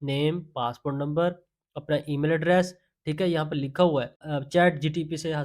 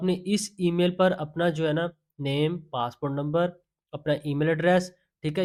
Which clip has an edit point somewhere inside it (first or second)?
first